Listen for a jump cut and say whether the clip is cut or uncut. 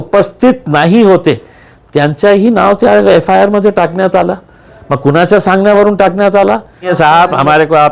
cut